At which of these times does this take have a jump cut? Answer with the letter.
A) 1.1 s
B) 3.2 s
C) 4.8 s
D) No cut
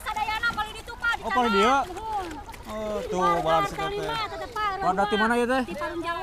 D